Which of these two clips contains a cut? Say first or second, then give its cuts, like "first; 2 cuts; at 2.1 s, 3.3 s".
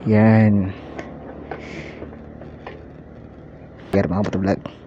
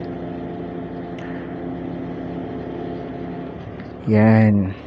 first; 1 cut; at 3.9 s